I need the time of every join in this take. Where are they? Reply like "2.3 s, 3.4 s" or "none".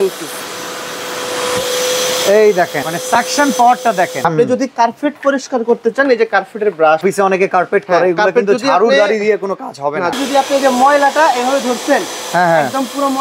2.9 s, 4.2 s, 7.0 s, 10.1 s